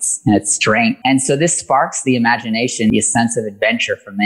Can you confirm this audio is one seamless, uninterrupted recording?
no; 2 cuts; at 1.0 s, 2.9 s

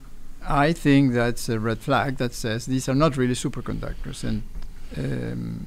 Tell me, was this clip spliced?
no; 0 cuts

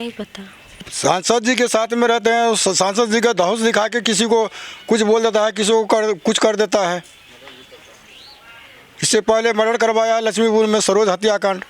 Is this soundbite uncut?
no; 1 cut; at 0.9 s

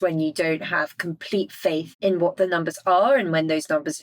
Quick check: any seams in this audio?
yes; 1 cut; at 1.9 s

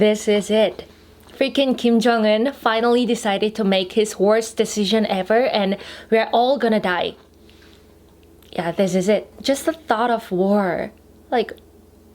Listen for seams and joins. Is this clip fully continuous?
no; 1 cut; at 9.3 s

